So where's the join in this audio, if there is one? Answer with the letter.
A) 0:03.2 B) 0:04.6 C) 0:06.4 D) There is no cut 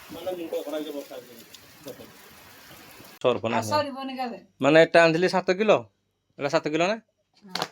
A